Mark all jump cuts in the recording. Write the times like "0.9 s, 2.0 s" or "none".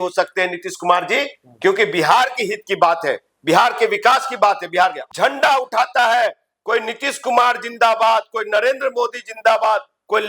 5.0 s